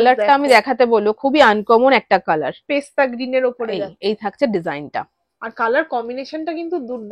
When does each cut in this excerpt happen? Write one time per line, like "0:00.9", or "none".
none